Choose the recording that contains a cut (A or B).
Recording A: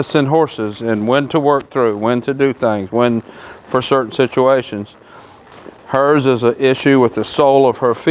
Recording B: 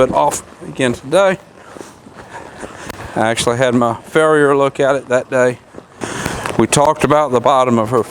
B